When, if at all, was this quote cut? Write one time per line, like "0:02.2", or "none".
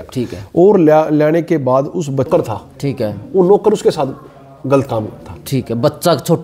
0:02.3

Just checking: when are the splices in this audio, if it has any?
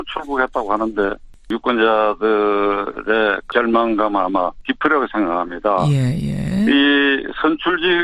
none

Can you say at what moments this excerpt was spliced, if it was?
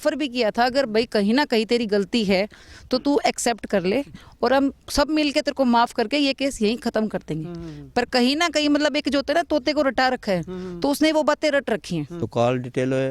0:12.2

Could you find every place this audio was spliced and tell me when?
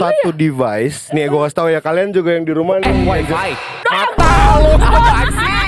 none

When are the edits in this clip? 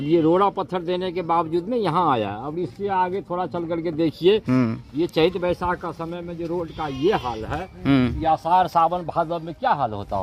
none

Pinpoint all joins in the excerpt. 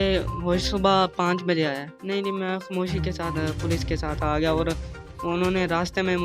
0:01.9

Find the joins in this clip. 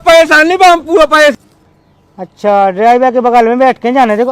0:01.4

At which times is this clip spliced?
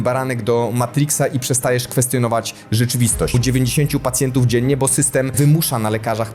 0:03.4
0:05.3

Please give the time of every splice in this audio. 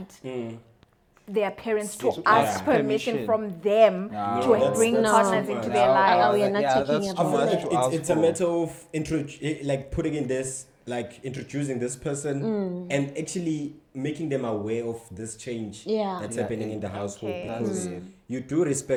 none

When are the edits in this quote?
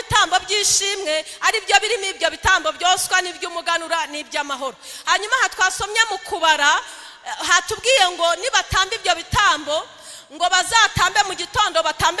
none

